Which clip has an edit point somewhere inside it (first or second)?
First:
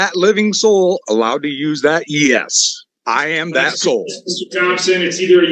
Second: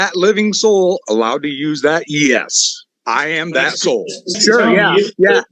second